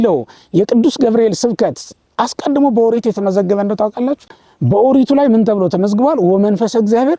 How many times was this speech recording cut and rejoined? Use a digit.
0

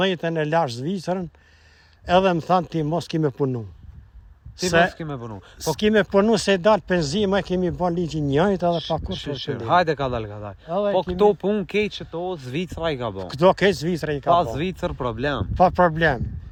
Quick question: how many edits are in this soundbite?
0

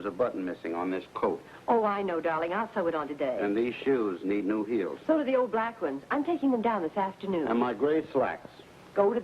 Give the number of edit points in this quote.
1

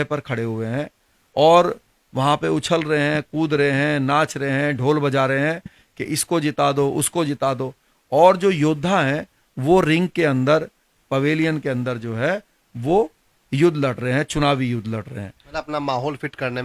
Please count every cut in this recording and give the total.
0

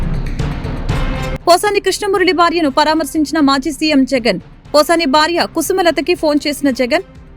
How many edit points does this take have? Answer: 0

